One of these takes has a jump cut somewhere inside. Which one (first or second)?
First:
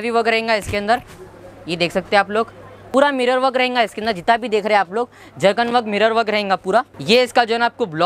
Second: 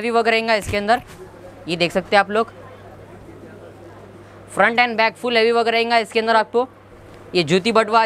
first